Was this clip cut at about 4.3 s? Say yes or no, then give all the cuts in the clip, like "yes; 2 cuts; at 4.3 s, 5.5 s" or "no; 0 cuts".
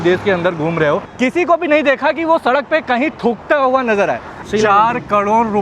yes; 2 cuts; at 1.1 s, 4.3 s